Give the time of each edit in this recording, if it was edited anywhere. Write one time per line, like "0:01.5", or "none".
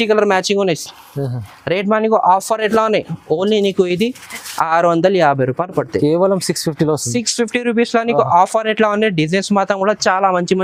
none